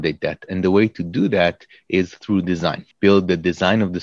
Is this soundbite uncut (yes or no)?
no